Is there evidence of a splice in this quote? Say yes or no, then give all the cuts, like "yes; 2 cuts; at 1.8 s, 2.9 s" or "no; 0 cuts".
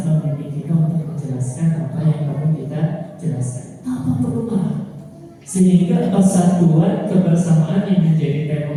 no; 0 cuts